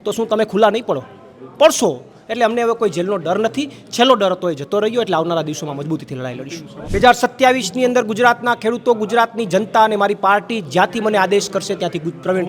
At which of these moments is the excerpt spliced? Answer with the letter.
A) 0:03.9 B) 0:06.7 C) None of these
B